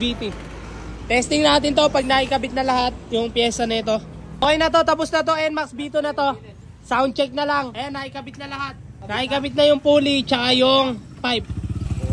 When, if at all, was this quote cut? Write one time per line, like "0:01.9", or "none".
none

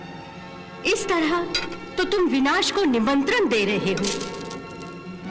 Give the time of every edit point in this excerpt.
none

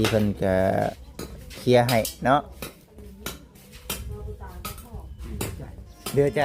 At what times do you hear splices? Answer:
none

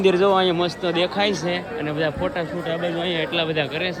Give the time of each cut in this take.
none

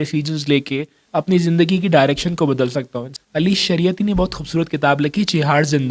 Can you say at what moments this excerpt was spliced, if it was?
0:03.0

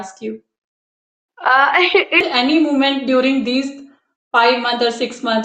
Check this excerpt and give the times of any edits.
0:02.3

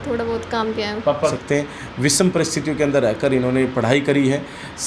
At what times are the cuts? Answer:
0:01.4

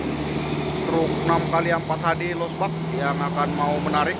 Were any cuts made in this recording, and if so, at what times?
none

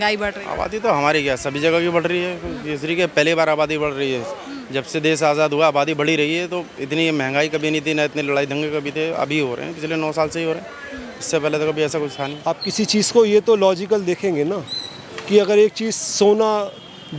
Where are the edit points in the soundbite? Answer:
0:12.4

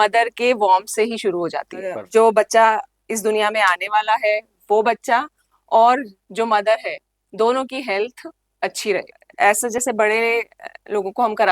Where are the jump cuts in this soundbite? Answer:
0:02.0
0:09.2

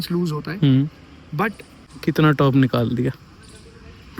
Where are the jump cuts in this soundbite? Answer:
0:01.9

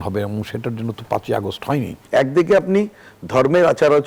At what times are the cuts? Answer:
0:01.9

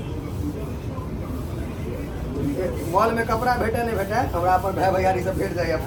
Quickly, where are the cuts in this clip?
none

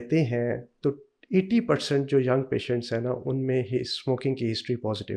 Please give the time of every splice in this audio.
none

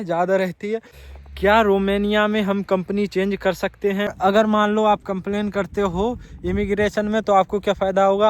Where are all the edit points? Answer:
0:00.9
0:04.1

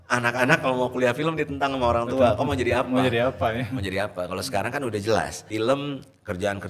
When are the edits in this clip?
0:05.4

